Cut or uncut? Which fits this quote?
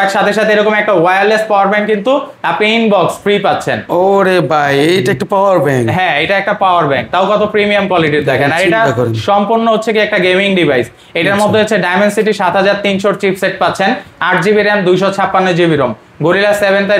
uncut